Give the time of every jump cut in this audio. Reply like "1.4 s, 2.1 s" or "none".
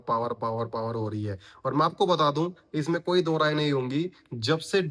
none